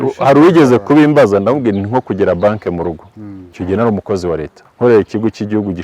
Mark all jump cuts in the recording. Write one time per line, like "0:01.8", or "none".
0:03.6
0:04.6